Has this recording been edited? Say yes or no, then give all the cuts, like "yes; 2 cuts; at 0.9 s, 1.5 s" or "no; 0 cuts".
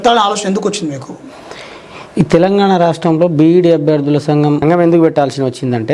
yes; 1 cut; at 4.6 s